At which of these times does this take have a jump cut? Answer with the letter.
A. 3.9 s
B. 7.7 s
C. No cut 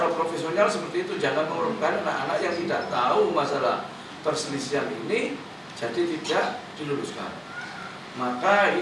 C